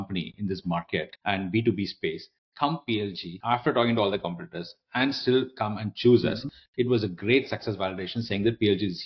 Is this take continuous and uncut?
no; 2 cuts; at 1.1 s, 3.3 s

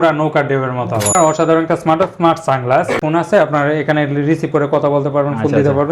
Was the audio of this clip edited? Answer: yes; 2 cuts; at 1.1 s, 3.0 s

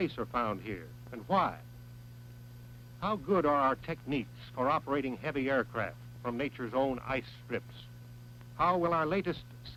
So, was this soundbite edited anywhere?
no; 0 cuts

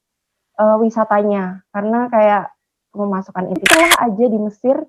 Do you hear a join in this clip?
yes; 1 cut; at 3.6 s

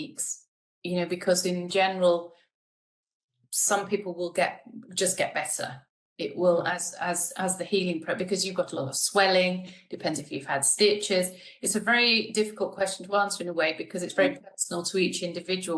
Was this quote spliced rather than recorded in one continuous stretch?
no; 0 cuts

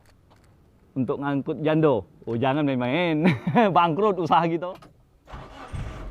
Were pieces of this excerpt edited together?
yes; 1 cut; at 4.6 s

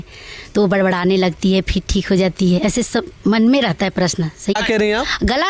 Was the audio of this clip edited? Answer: yes; 1 cut; at 4.5 s

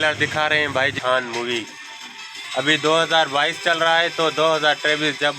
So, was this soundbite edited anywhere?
yes; 1 cut; at 0.9 s

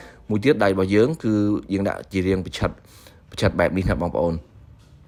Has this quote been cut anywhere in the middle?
no; 0 cuts

